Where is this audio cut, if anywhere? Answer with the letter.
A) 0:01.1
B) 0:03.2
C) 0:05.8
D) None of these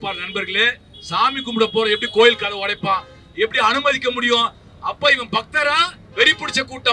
D